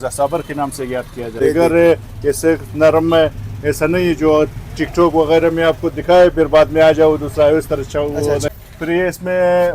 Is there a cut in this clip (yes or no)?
yes